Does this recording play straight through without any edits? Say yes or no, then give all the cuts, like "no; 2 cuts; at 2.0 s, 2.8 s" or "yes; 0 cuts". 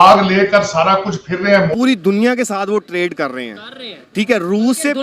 no; 1 cut; at 1.7 s